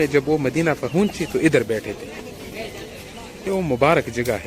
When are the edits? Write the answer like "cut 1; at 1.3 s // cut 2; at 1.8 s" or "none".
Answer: cut 1; at 3.5 s